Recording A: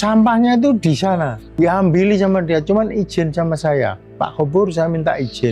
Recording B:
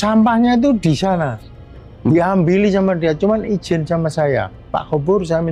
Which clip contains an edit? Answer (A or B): A